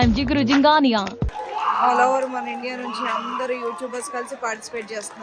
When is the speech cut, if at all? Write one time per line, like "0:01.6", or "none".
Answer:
0:01.2